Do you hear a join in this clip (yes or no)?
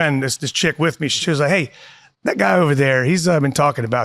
yes